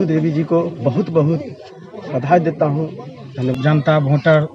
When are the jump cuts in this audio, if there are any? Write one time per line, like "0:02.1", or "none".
0:03.5